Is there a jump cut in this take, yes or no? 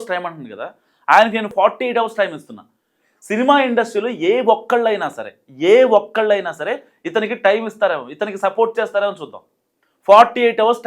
yes